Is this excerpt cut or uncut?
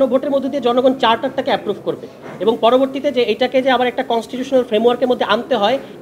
uncut